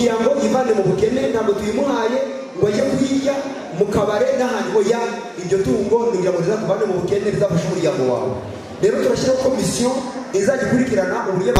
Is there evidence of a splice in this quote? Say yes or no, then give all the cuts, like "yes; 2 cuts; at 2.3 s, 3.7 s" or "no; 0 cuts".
no; 0 cuts